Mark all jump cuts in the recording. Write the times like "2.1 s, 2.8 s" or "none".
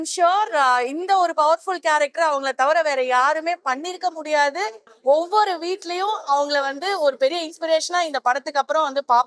4.9 s